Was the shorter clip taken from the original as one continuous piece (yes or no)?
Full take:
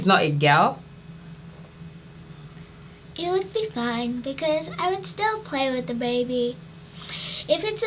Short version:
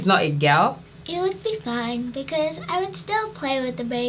no